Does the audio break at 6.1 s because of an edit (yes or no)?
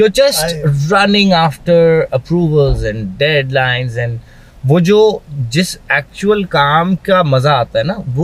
no